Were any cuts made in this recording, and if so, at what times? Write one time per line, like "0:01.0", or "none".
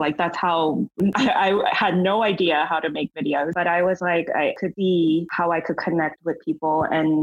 0:01.0